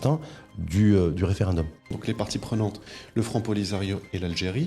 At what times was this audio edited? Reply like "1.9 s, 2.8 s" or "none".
2.0 s